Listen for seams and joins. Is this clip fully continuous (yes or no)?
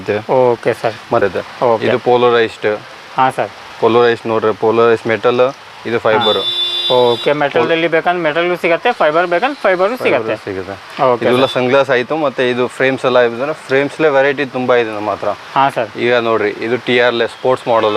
no